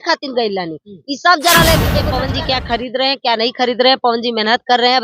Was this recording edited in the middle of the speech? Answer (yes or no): yes